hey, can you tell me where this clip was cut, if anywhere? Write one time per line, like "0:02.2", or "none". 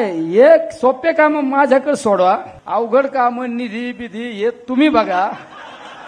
0:02.6